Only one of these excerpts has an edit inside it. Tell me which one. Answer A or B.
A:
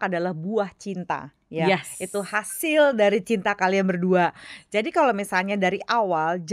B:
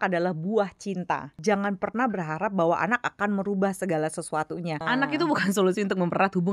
B